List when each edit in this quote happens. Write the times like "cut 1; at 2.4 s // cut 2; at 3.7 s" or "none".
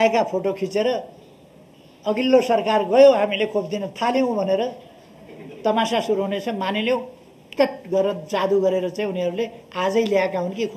none